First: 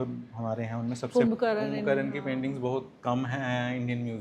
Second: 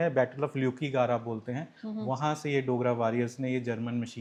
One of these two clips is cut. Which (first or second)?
first